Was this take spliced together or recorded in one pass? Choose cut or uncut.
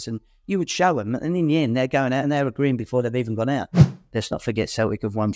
cut